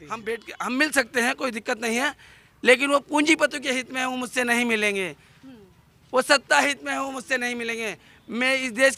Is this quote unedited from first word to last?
yes; 0 cuts

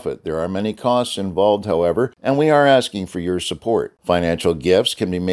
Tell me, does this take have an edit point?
yes; 1 cut; at 2.2 s

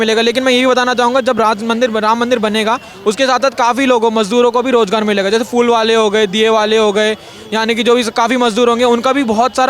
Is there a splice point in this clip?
no; 0 cuts

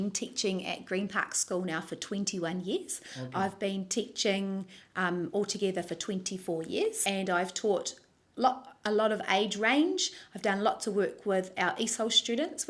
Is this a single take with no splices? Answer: yes; 0 cuts

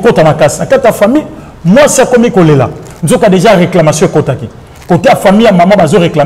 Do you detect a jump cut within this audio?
no; 0 cuts

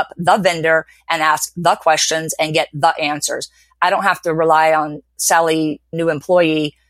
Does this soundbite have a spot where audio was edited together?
yes; 1 cut; at 5.9 s

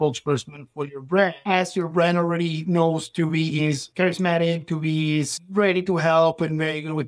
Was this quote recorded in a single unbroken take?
no; 1 cut; at 3.9 s

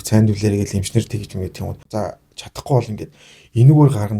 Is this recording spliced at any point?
yes; 1 cut; at 1.8 s

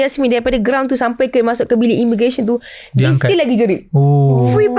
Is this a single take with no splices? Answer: yes; 0 cuts

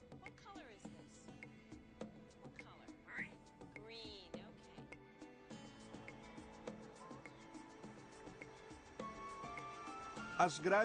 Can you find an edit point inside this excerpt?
no; 0 cuts

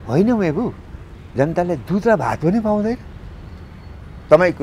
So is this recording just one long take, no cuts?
yes; 0 cuts

